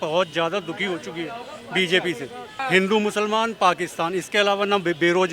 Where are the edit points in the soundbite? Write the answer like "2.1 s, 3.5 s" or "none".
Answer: 2.6 s